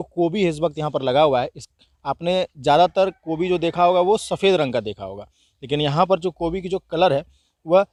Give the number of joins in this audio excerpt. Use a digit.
0